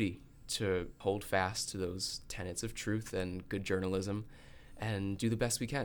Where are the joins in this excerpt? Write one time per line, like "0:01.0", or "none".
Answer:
0:00.9